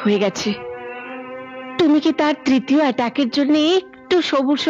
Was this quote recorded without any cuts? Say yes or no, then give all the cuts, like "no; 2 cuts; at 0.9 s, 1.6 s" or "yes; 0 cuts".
yes; 0 cuts